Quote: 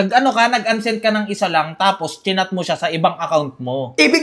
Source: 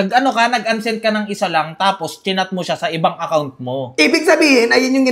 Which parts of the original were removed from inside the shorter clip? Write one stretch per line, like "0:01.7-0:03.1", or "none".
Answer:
none